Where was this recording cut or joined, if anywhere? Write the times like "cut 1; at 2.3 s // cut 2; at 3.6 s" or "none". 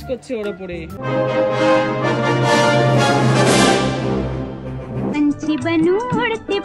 cut 1; at 1.0 s // cut 2; at 5.1 s